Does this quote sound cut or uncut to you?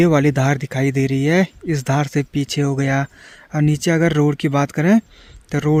uncut